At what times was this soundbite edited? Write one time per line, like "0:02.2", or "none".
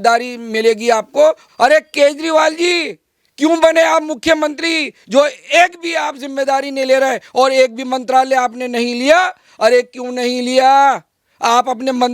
0:01.4

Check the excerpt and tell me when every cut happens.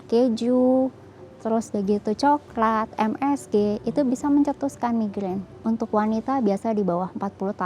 0:05.5

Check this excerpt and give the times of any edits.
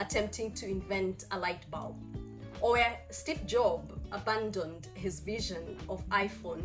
none

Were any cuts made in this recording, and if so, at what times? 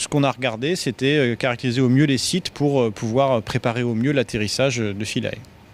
0:02.7

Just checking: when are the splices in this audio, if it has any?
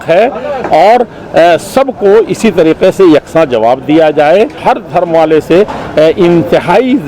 0:04.6

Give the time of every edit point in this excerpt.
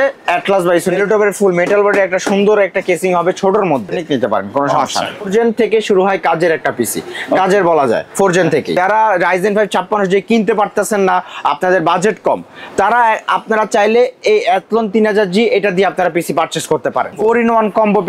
0:01.0
0:04.0
0:05.3
0:08.7
0:17.2

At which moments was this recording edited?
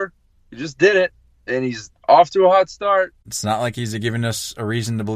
0:03.2

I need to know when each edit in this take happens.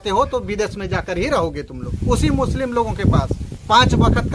0:01.8
0:03.4

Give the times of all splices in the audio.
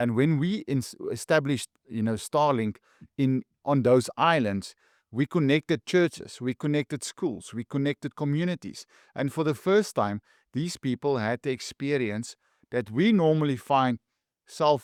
none

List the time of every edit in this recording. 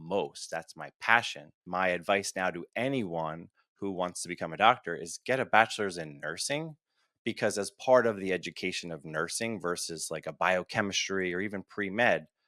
0:01.6

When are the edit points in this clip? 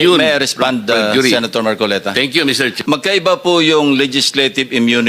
0:02.8

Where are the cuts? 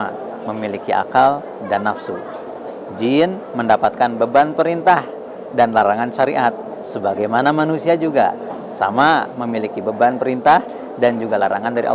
none

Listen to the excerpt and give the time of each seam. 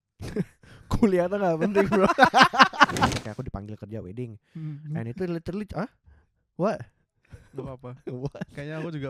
0:03.1

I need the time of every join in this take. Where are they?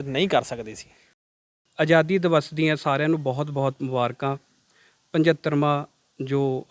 0:01.4

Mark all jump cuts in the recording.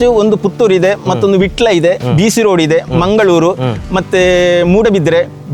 none

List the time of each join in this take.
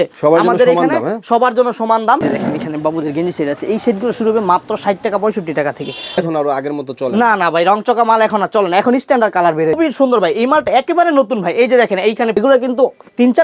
0:02.2
0:06.2
0:09.8
0:12.4

